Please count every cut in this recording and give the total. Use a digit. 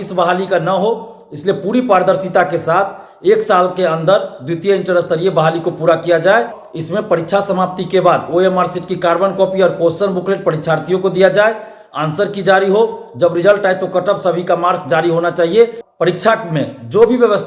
2